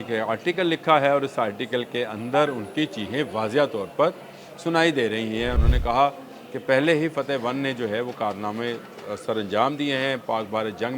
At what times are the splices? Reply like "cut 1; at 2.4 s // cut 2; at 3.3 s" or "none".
cut 1; at 5.6 s